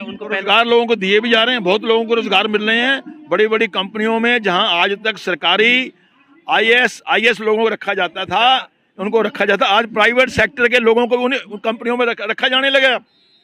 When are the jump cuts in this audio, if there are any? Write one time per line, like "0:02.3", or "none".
none